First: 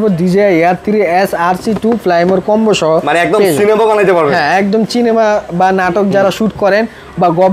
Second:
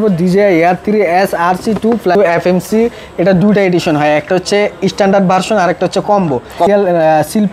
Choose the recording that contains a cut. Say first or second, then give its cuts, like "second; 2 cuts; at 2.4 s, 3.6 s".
second; 2 cuts; at 2.1 s, 6.7 s